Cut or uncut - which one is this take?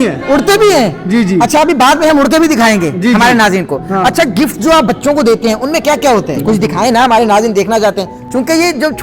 cut